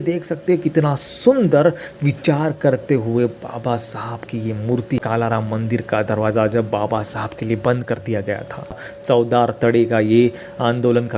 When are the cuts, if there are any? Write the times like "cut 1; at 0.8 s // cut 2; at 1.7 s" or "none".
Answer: cut 1; at 5.0 s // cut 2; at 8.9 s